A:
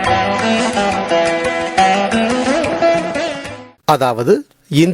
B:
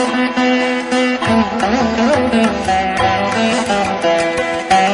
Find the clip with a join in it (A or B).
A